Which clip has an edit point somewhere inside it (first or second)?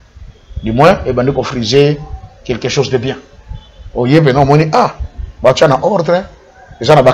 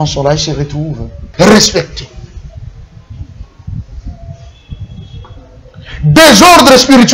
second